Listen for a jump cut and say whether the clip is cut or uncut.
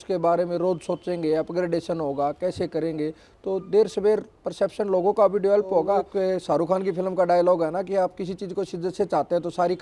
cut